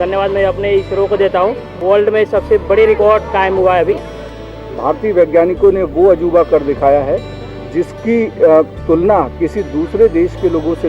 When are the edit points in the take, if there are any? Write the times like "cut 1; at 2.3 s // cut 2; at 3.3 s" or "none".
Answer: cut 1; at 1.8 s // cut 2; at 4.4 s